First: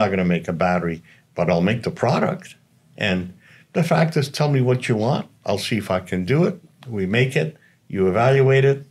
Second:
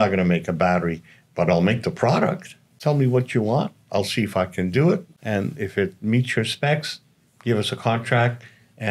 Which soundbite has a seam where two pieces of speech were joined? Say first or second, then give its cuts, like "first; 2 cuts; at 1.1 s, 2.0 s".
second; 2 cuts; at 2.8 s, 5.1 s